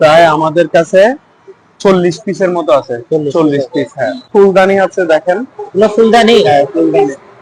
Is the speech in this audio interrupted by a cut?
yes; 1 cut; at 4.2 s

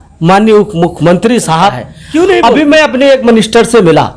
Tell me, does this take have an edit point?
yes; 1 cut; at 2.4 s

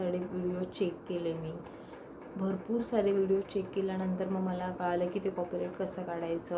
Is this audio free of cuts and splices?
yes; 0 cuts

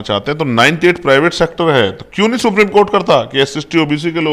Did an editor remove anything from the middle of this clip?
no; 0 cuts

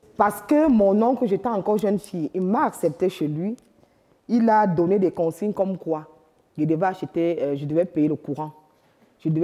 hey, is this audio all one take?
yes; 0 cuts

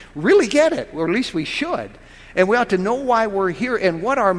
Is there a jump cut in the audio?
no; 0 cuts

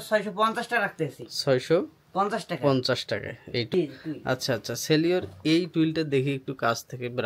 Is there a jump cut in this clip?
no; 0 cuts

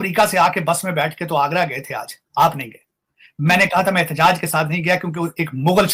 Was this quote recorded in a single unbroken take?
yes; 0 cuts

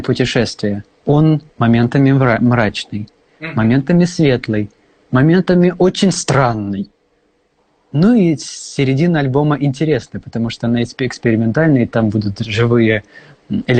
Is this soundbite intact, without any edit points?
no; 2 cuts; at 0.9 s, 1.5 s

